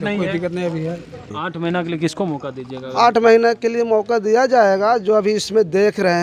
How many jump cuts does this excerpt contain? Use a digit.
1